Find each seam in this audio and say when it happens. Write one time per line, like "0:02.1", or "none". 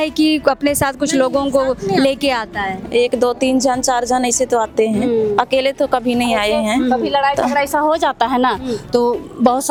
none